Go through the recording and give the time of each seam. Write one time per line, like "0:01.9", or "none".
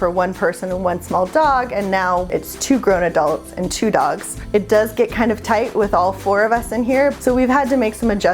0:02.3
0:04.3
0:07.1